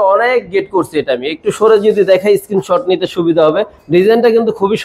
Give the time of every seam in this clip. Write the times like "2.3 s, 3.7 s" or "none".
none